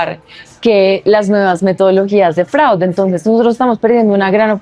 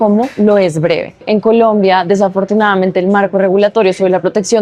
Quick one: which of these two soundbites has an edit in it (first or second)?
second